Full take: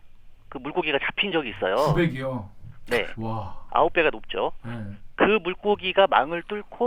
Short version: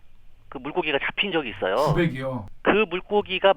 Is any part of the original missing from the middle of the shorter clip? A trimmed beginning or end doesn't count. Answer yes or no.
yes